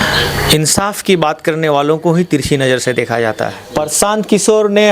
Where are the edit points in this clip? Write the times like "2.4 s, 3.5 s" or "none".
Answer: 3.6 s